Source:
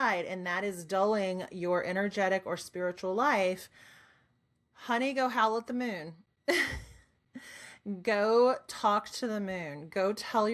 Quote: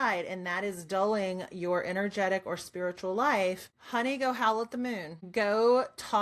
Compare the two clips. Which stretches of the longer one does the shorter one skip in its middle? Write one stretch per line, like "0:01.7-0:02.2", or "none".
0:03.7-0:04.7
0:06.1-0:07.9